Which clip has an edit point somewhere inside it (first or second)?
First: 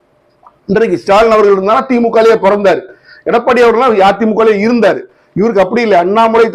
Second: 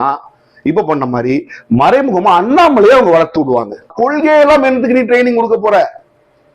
second